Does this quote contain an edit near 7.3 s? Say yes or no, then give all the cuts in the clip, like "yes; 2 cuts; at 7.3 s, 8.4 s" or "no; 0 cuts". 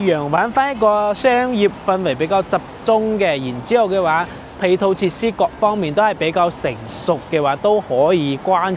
no; 0 cuts